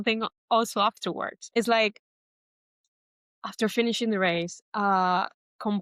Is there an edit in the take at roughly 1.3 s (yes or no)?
yes